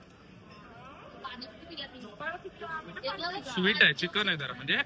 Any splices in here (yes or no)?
no